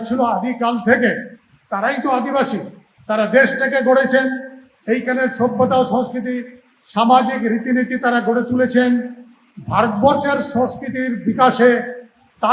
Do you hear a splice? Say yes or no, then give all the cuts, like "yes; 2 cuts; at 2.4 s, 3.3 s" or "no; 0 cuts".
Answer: no; 0 cuts